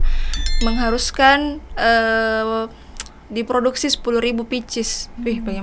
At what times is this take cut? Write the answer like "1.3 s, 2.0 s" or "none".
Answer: none

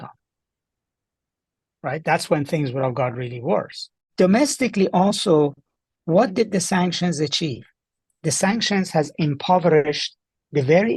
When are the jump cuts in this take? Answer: 4.1 s

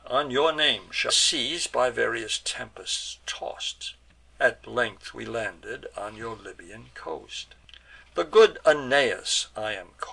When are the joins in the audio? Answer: none

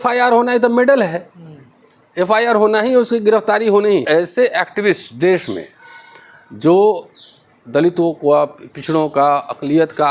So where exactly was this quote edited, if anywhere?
4.0 s

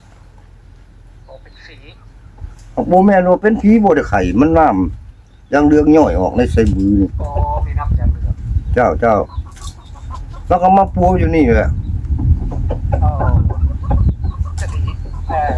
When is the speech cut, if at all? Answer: none

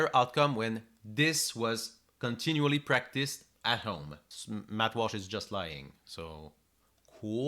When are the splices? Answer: 4.2 s

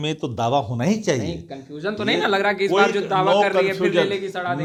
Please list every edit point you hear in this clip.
none

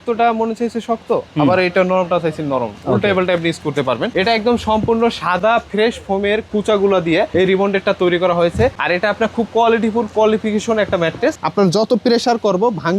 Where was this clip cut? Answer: 4.1 s, 11.4 s

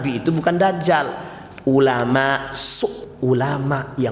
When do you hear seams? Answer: 3.0 s

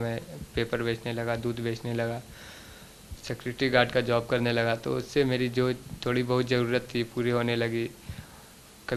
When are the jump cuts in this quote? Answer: none

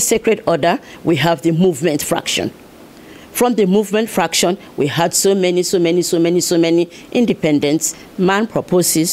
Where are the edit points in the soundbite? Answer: 8.0 s

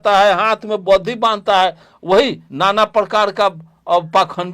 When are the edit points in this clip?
2.4 s

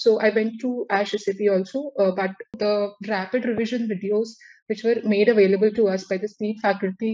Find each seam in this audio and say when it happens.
2.5 s

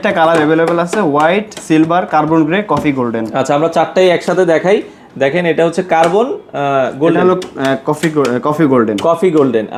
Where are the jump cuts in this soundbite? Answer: none

